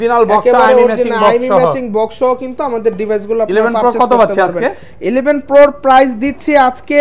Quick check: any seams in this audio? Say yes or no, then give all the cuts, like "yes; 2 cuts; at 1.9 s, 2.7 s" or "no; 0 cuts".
no; 0 cuts